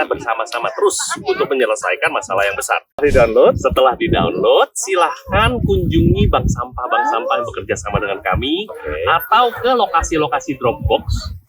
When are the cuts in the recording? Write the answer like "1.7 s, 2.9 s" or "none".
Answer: 3.0 s